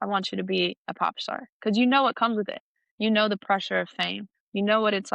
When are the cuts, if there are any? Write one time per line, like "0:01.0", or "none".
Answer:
none